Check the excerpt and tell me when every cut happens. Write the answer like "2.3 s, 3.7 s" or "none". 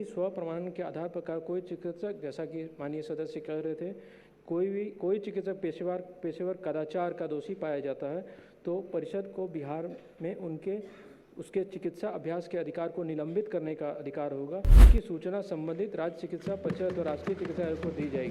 14.9 s